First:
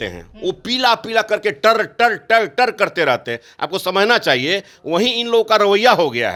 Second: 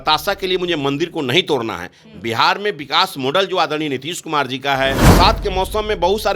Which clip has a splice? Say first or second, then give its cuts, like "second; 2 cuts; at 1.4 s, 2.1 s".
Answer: second; 1 cut; at 5.1 s